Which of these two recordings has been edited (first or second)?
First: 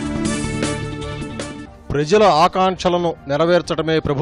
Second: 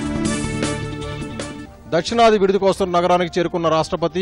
second